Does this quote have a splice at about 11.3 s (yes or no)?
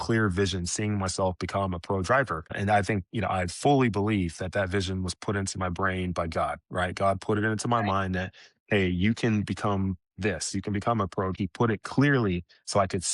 yes